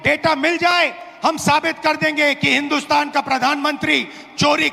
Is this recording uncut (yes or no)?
yes